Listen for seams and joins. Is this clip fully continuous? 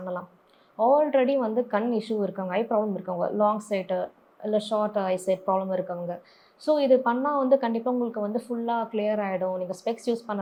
yes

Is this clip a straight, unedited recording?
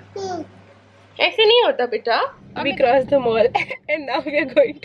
no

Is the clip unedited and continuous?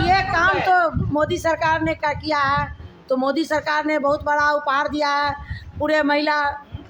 yes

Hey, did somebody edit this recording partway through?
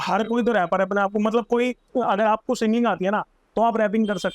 yes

